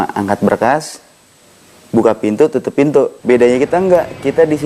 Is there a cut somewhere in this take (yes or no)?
yes